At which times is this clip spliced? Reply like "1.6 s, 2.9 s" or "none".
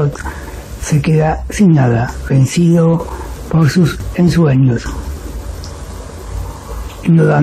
none

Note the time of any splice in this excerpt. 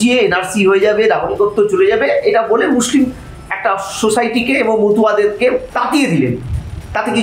5.7 s

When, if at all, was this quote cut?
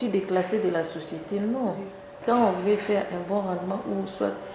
2.2 s

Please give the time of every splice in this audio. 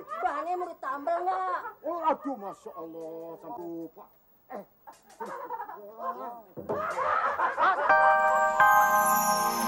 7.9 s

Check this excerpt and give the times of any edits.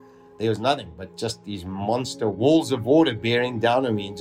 2.3 s

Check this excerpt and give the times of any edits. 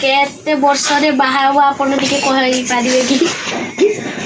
none

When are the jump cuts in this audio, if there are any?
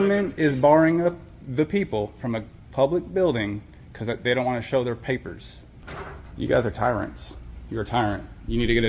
5.8 s

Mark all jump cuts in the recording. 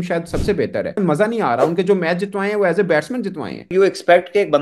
1.0 s, 3.7 s

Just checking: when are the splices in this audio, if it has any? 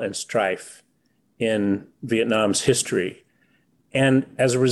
none

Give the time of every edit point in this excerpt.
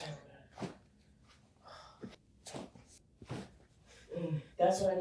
2.1 s, 2.9 s

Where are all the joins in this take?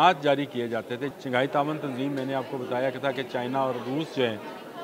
1.1 s

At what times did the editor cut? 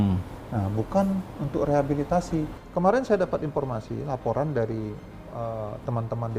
2.6 s

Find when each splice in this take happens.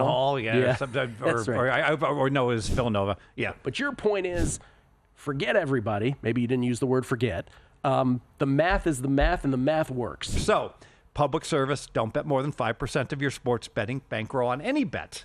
10.4 s

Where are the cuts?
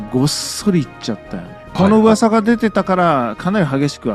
1.7 s

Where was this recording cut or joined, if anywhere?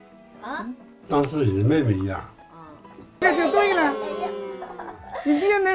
3.2 s

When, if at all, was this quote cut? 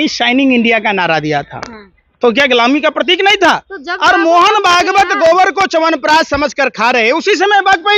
none

